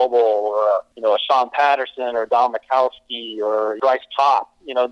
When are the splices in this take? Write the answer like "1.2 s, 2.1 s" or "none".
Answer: 0.9 s, 3.8 s